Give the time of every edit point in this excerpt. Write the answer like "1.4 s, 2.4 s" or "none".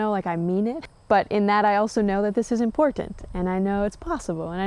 0.9 s